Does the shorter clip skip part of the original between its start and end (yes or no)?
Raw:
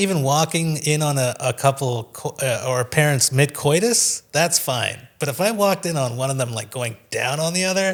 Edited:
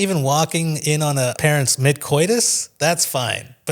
yes